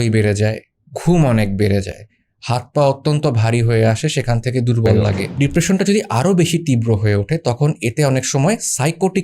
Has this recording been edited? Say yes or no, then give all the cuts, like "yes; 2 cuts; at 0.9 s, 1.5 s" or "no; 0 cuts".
yes; 1 cut; at 5.2 s